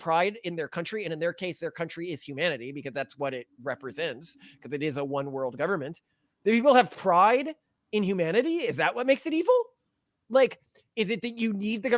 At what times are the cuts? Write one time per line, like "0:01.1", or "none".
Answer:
0:10.2